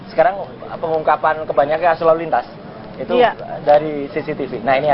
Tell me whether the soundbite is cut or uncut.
uncut